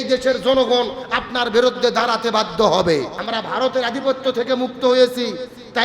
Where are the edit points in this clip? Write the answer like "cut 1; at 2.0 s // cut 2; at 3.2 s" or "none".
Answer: cut 1; at 3.2 s